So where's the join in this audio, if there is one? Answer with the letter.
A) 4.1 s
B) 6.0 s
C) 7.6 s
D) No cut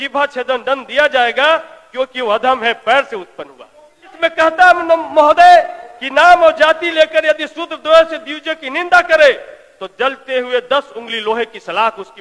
A